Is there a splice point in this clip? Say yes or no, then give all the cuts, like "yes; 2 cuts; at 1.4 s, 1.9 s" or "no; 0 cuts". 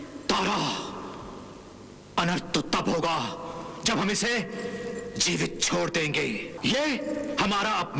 yes; 1 cut; at 6.5 s